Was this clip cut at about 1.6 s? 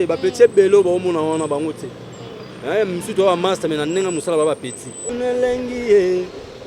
no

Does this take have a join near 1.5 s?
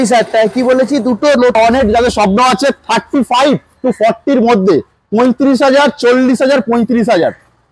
yes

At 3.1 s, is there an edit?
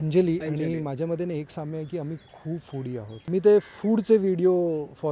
yes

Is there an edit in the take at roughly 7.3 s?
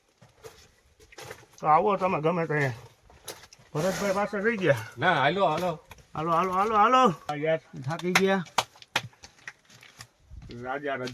yes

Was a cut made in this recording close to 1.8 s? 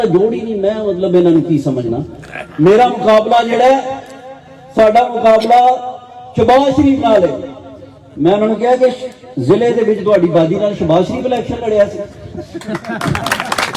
no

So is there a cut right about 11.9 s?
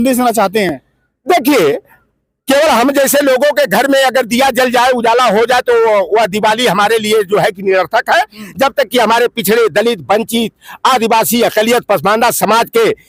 no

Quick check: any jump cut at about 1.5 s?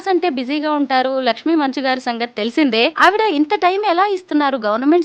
no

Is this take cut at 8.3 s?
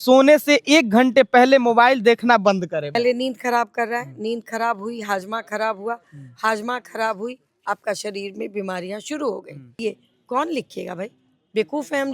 no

